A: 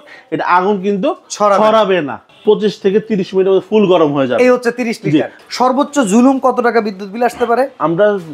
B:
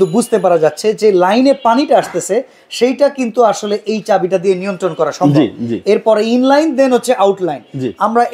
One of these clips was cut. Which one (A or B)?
A